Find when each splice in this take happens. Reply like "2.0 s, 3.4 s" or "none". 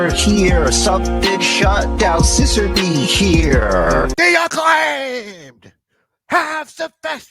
4.1 s